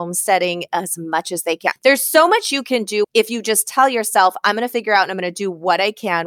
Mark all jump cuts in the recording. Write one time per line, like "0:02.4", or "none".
0:01.7
0:03.1